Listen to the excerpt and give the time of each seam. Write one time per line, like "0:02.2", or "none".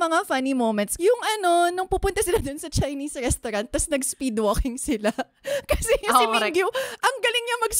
0:00.9

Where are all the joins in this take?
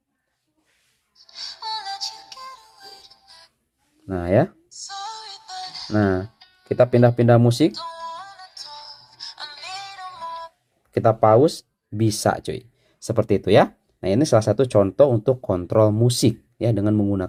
none

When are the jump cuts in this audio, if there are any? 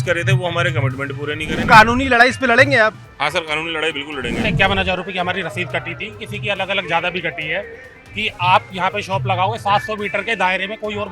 0:01.6
0:04.5

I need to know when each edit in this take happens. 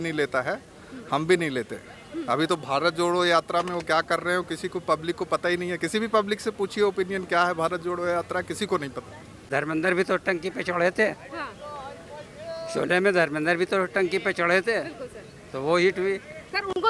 0:09.4

